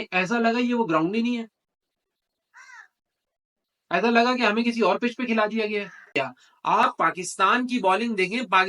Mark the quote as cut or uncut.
cut